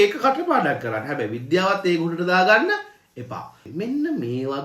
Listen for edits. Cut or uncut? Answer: cut